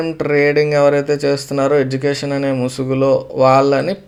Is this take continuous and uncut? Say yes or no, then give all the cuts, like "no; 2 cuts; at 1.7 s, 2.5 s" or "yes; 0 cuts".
yes; 0 cuts